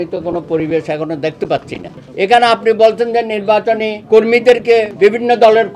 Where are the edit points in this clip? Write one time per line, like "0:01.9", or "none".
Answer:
0:01.9